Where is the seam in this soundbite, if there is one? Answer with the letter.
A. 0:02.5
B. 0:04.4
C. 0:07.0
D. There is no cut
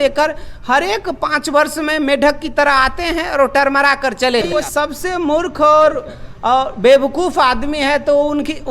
B